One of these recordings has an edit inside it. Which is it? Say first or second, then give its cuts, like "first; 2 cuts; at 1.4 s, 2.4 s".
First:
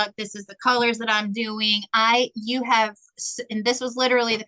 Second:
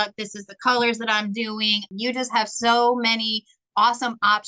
second; 1 cut; at 1.8 s